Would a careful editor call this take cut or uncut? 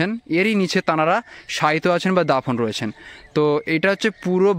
uncut